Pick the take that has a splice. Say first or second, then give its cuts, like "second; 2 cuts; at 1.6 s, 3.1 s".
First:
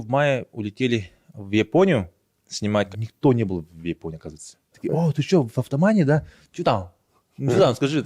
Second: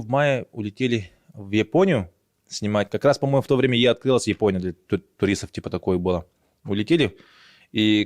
first; 2 cuts; at 2.9 s, 4.8 s